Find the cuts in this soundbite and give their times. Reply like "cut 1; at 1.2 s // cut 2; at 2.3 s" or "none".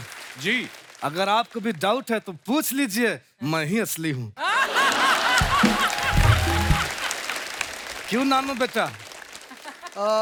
none